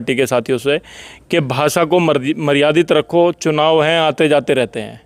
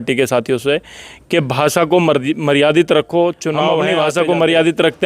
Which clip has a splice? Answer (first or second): second